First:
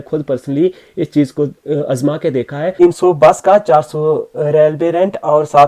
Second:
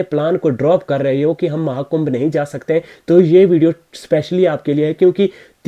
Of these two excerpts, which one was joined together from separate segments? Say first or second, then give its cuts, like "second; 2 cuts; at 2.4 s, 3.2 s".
first; 1 cut; at 2.7 s